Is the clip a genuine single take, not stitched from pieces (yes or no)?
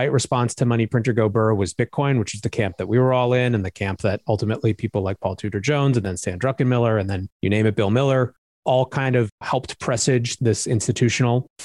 no